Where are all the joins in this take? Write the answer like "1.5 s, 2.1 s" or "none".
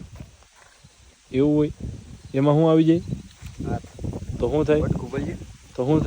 3.3 s